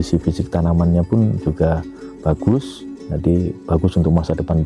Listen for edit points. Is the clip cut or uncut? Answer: cut